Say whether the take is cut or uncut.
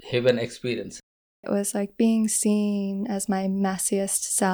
cut